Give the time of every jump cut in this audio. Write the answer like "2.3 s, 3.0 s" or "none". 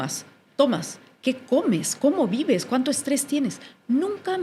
none